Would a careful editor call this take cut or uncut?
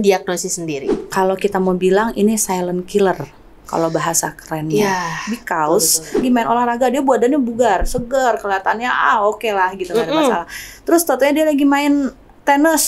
cut